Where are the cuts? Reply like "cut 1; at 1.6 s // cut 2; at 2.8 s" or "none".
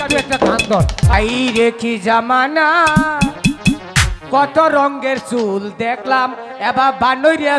cut 1; at 1.1 s